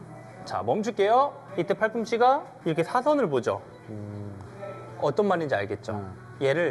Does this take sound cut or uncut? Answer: cut